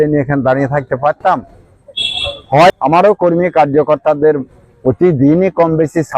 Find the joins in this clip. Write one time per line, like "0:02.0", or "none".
0:02.7

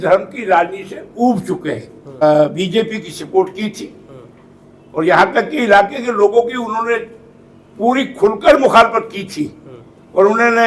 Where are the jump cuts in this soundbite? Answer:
0:02.2

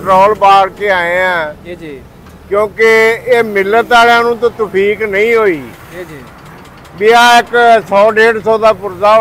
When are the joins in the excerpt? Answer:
none

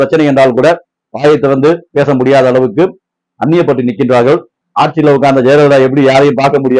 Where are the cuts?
0:04.5

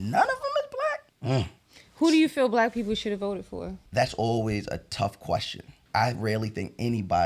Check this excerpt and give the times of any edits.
0:01.1
0:03.8
0:05.8

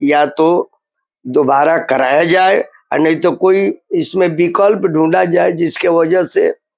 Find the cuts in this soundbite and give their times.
none

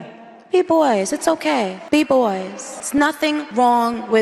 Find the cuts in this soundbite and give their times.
none

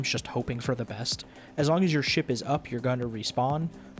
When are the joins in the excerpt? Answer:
0:01.4

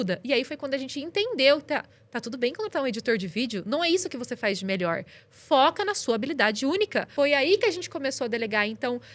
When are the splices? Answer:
0:07.1

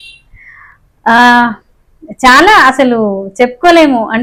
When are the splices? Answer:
none

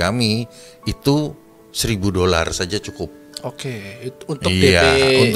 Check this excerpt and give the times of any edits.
none

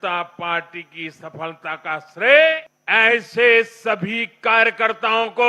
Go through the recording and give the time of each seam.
0:02.7

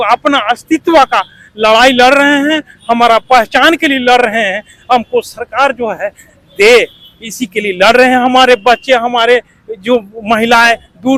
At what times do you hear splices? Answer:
none

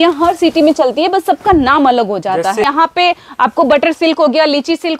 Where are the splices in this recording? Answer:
0:02.6

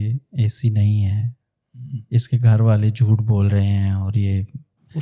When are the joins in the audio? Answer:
none

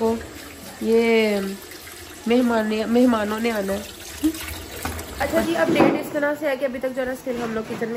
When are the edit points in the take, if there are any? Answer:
0:05.1

